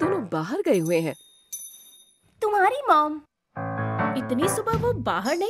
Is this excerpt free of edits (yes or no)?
yes